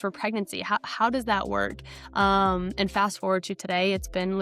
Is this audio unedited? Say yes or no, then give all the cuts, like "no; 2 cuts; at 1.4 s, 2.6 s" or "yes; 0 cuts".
yes; 0 cuts